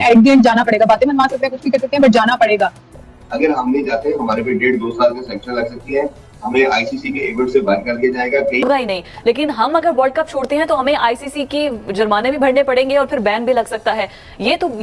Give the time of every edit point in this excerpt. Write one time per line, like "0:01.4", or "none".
0:02.8
0:08.6

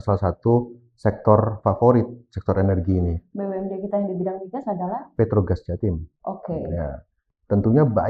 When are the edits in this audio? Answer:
none

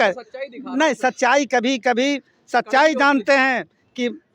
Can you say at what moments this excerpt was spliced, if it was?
none

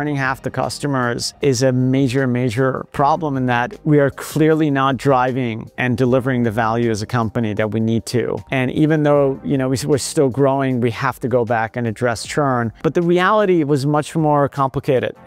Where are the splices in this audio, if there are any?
0:12.7

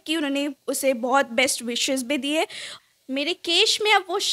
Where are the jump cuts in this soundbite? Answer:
0:02.8

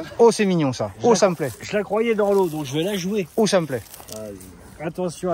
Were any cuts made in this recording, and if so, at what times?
none

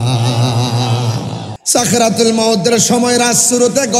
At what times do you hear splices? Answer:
0:01.5

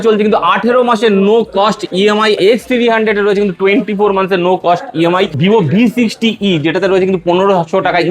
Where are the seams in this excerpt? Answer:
0:02.4
0:05.3

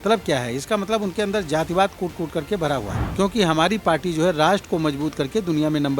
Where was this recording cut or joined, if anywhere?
0:03.0

